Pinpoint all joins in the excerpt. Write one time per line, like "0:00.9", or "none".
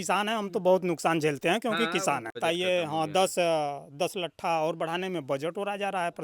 0:02.4